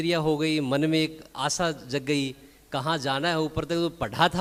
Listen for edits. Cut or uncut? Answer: uncut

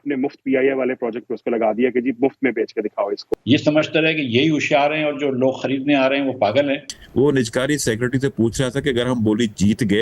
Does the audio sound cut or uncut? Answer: cut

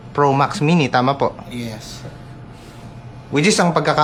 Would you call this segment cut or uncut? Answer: uncut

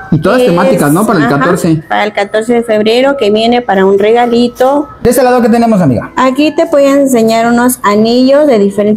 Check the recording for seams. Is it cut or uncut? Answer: cut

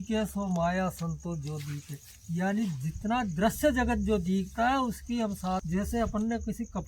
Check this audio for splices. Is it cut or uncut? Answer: cut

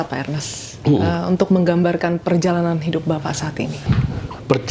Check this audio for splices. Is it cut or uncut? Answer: cut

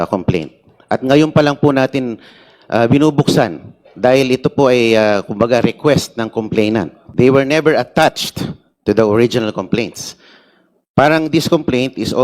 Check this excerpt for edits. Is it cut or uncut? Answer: cut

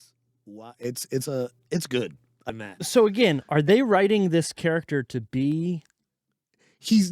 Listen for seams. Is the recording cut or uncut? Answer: cut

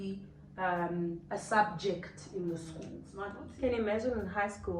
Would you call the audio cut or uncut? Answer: cut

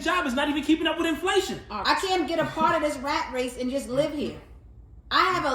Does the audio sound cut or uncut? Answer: cut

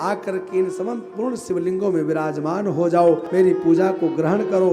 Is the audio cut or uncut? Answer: cut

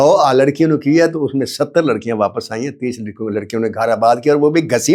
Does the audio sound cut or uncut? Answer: uncut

